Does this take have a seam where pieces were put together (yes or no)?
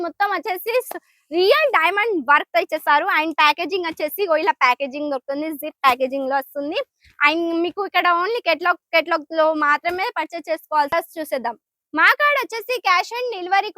yes